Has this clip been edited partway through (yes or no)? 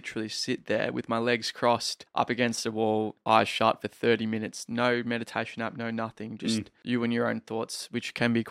yes